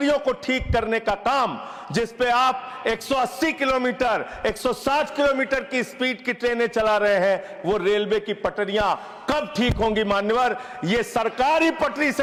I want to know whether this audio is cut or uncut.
uncut